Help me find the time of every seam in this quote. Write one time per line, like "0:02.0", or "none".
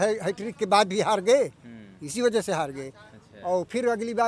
none